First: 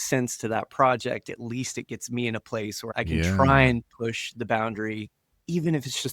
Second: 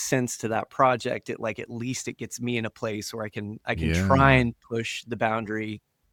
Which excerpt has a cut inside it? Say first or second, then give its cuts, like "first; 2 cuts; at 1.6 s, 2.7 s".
first; 2 cuts; at 1.3 s, 2.9 s